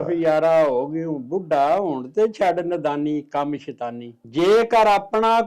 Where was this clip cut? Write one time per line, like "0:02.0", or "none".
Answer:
0:04.2